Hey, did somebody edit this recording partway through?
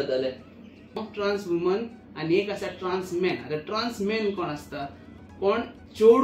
yes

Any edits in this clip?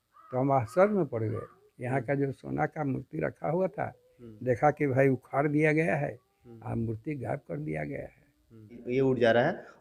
yes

